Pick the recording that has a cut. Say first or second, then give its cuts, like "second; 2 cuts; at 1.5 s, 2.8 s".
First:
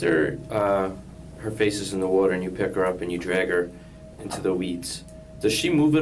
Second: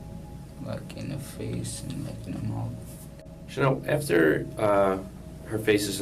second; 1 cut; at 3.0 s